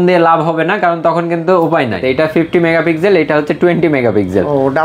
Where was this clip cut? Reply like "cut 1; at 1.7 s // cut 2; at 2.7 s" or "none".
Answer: cut 1; at 2.0 s